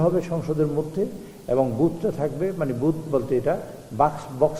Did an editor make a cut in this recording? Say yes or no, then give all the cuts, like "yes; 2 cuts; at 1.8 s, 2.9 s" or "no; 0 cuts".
no; 0 cuts